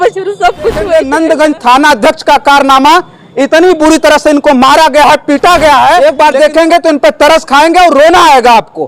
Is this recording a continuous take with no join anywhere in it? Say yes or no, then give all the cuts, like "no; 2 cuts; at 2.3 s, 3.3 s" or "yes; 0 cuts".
no; 2 cuts; at 0.9 s, 6.0 s